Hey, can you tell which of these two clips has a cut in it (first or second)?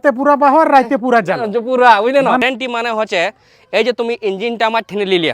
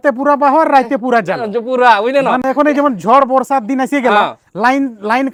first